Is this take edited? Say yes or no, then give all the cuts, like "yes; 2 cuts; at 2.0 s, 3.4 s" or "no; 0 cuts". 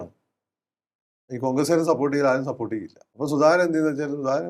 yes; 1 cut; at 3.0 s